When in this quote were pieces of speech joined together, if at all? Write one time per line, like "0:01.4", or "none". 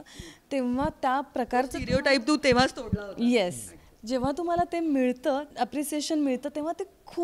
0:05.5